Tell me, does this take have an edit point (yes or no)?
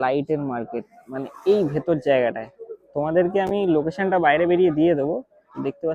no